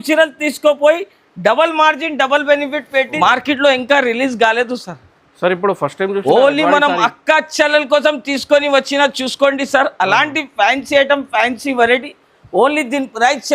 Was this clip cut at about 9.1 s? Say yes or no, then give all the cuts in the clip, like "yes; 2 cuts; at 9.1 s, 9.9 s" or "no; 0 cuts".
no; 1 cut; at 3.1 s